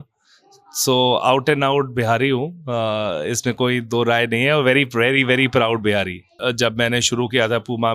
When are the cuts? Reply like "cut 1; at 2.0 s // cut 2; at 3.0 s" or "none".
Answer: cut 1; at 6.4 s